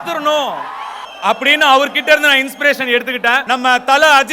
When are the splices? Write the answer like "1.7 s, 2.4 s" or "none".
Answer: none